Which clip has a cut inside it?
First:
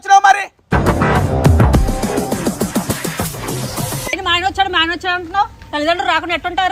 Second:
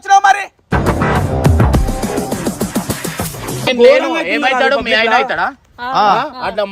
second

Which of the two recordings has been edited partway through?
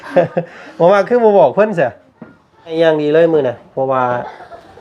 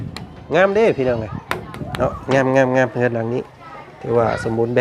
first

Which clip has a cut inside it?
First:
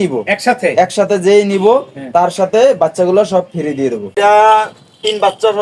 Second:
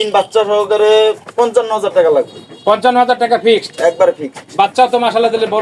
first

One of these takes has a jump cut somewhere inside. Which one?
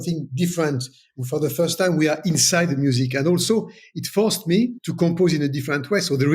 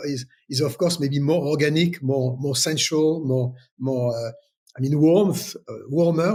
first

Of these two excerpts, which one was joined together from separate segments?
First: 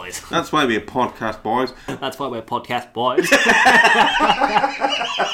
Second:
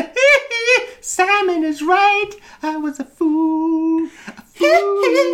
first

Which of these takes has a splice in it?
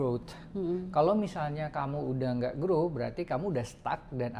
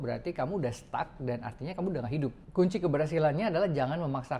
second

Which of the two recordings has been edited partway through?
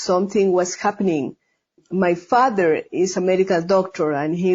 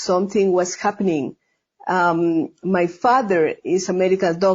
first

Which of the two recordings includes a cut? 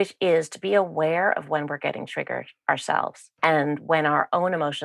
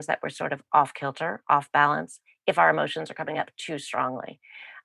first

